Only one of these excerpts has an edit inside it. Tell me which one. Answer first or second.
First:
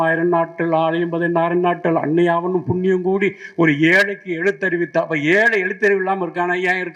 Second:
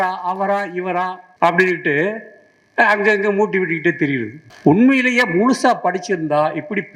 second